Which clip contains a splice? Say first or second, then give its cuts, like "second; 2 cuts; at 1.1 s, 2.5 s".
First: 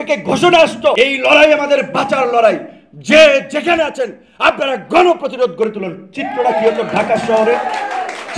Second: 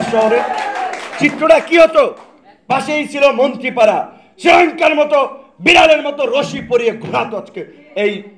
first; 1 cut; at 1.0 s